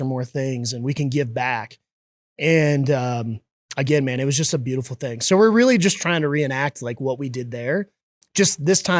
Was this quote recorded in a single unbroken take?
yes; 0 cuts

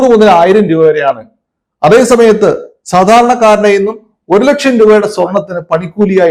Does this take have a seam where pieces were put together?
no; 0 cuts

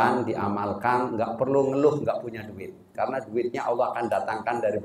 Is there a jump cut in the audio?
yes; 1 cut; at 2.9 s

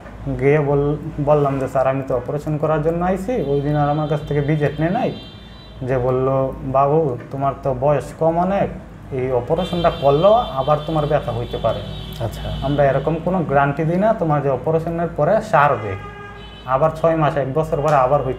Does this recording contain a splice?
no; 0 cuts

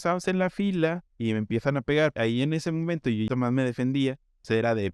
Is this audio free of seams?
no; 3 cuts; at 1.1 s, 2.1 s, 3.3 s

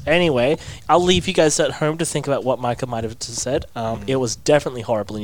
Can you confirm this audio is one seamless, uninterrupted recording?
yes; 0 cuts

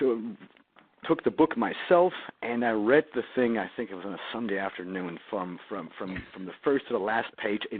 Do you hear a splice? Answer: yes; 1 cut; at 3.6 s

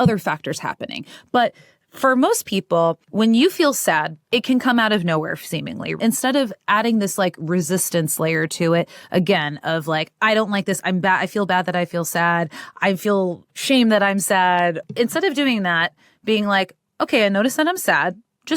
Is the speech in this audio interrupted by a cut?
yes; 2 cuts; at 5.9 s, 14.8 s

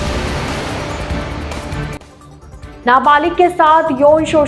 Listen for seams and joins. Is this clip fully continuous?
no; 1 cut; at 2.1 s

